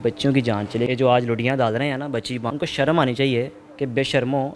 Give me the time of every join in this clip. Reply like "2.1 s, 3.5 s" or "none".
0.9 s, 2.5 s